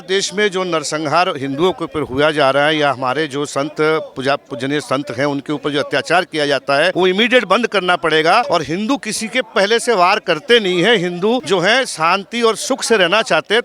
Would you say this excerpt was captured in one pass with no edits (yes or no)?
no